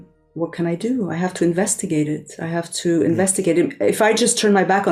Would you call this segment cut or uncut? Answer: uncut